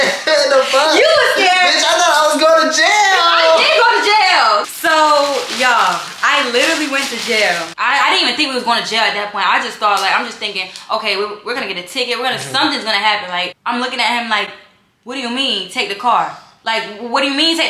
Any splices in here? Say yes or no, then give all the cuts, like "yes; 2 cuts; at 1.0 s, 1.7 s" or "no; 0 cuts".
yes; 3 cuts; at 4.7 s, 7.7 s, 13.5 s